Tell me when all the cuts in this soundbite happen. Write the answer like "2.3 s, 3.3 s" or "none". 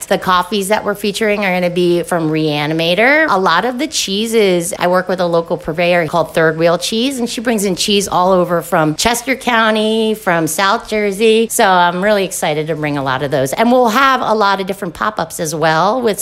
3.3 s, 6.1 s, 11.5 s